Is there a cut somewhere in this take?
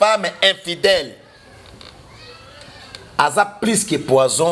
no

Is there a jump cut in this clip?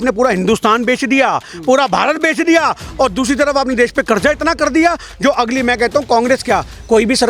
no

